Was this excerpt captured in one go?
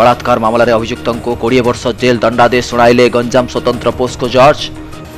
yes; 0 cuts

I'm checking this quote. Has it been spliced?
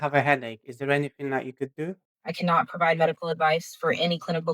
yes; 1 cut; at 2.1 s

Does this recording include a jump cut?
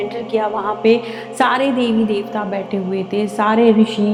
no; 0 cuts

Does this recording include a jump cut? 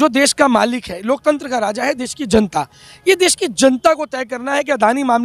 no; 0 cuts

